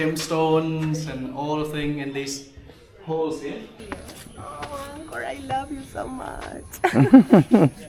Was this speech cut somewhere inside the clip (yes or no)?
yes